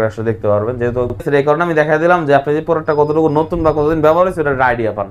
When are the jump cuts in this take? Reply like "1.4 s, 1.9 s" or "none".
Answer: 1.2 s